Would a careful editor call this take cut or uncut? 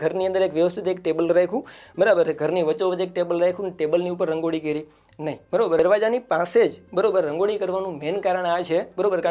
uncut